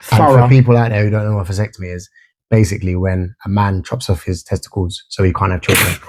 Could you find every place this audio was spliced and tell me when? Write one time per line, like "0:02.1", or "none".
none

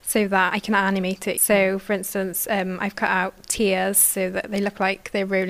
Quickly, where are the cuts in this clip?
none

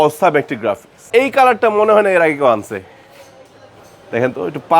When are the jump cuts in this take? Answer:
0:01.0

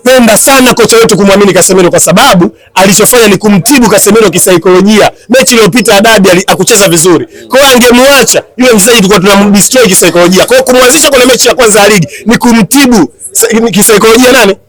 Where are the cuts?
none

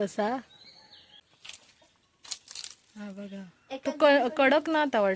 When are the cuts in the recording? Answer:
0:01.2

